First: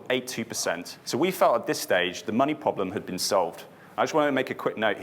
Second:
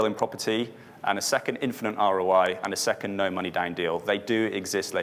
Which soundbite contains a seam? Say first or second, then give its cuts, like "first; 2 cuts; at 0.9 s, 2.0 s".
first; 1 cut; at 0.9 s